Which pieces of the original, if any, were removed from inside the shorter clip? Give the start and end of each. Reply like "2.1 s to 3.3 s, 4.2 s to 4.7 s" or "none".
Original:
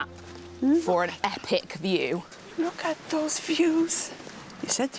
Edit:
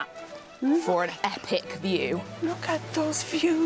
2.3 s to 2.5 s